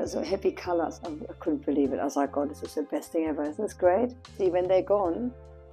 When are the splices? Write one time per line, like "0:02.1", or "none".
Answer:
0:01.0
0:04.3